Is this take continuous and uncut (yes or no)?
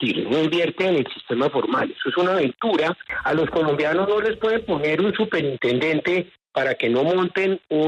no